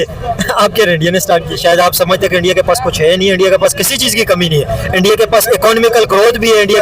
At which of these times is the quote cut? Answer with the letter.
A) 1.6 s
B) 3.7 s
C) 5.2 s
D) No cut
A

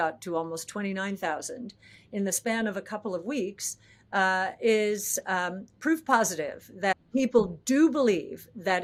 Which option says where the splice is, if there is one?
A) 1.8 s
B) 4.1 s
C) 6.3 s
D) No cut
D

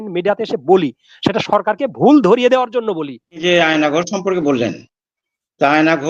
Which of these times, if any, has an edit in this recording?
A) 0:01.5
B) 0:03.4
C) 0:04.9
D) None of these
B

